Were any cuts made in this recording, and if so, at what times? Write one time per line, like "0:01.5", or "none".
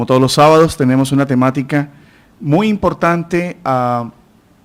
none